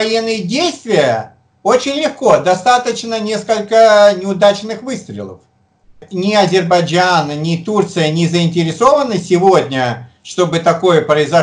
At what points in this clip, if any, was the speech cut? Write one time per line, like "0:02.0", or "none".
0:06.0